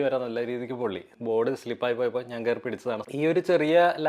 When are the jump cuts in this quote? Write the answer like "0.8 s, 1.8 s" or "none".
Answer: 1.1 s, 3.0 s